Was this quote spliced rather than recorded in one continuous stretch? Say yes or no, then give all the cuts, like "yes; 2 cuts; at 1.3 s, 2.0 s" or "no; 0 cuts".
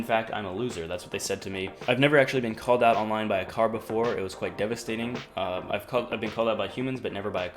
yes; 1 cut; at 1.8 s